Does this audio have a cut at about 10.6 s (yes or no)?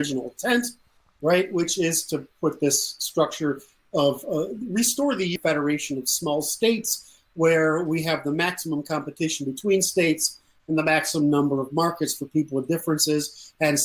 no